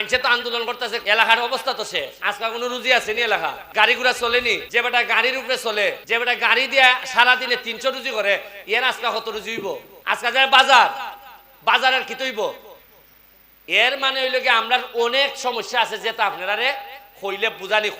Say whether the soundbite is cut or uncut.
cut